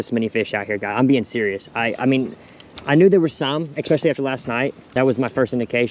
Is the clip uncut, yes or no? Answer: no